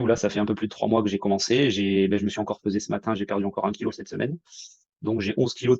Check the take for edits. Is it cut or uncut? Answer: uncut